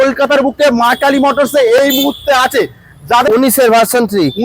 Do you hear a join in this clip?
yes; 1 cut; at 3.3 s

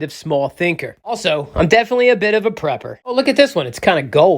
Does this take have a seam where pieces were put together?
yes; 2 cuts; at 1.1 s, 3.1 s

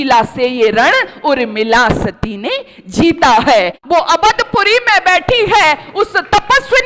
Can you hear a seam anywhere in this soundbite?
yes; 1 cut; at 3.8 s

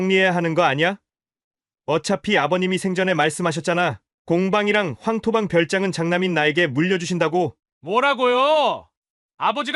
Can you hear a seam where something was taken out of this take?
yes; 1 cut; at 7.6 s

